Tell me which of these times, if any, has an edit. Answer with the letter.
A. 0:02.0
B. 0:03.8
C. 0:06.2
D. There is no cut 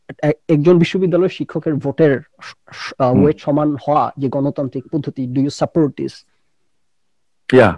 D